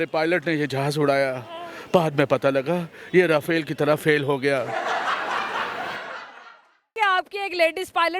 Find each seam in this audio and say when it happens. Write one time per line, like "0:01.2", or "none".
0:06.9